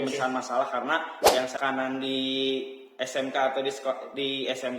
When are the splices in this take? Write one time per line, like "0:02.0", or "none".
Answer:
0:01.5